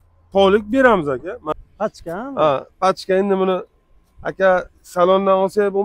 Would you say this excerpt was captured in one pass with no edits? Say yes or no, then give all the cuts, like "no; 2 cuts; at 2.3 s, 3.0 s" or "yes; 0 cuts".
no; 1 cut; at 1.4 s